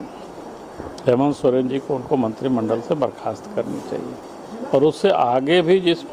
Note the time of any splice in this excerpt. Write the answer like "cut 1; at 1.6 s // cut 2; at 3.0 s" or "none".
cut 1; at 4.3 s